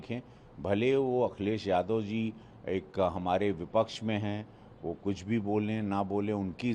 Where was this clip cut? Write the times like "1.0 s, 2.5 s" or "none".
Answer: none